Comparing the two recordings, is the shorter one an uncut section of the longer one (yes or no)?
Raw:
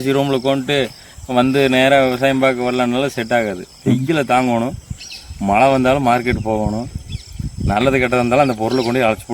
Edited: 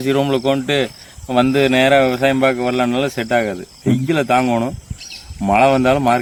yes